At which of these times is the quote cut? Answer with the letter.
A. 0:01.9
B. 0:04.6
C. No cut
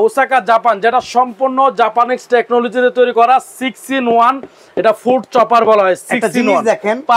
C